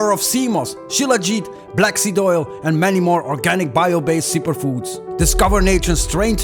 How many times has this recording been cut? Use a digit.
0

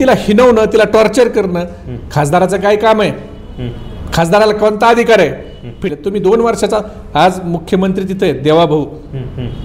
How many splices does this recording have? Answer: 1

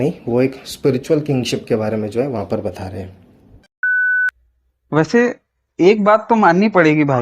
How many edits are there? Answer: 1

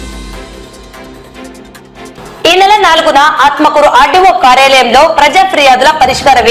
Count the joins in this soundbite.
1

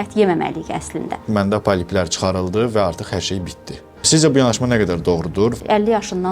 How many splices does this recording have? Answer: 3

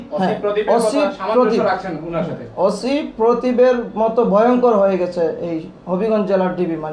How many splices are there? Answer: 0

